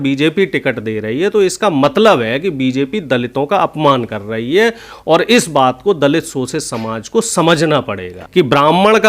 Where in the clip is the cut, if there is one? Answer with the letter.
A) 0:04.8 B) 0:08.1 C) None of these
B